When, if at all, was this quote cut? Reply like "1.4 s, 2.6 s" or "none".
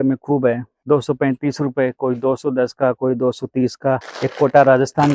4.1 s